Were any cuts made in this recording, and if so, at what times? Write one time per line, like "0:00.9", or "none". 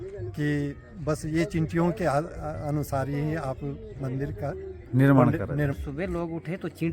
0:05.8